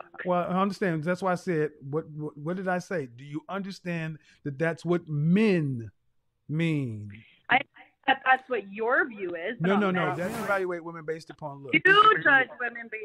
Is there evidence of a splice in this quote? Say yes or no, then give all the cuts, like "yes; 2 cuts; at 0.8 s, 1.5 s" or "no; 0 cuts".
yes; 1 cut; at 10.2 s